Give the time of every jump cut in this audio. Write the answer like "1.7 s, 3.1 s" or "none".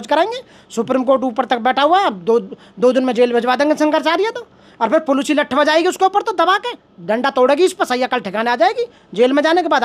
none